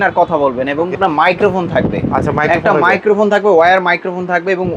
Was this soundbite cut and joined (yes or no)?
yes